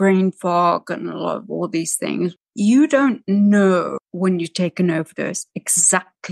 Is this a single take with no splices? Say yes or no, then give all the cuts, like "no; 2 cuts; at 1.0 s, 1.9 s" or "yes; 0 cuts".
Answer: no; 2 cuts; at 2.3 s, 4.0 s